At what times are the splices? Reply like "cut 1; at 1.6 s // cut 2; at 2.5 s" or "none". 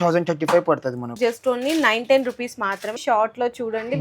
cut 1; at 1.1 s // cut 2; at 3.0 s